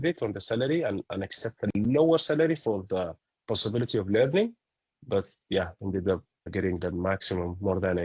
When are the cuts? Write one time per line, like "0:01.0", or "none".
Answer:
0:06.5